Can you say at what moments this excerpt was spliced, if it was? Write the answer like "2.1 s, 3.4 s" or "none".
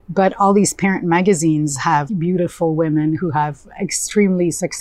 2.1 s